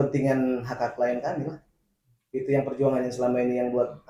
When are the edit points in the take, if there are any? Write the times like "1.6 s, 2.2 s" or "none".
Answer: none